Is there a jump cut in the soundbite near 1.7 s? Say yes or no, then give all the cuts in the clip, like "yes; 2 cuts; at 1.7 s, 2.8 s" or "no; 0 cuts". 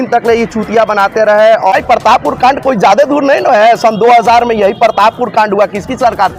yes; 1 cut; at 1.7 s